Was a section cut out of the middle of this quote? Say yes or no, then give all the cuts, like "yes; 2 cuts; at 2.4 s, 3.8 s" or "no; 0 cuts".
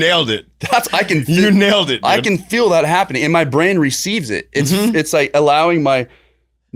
no; 0 cuts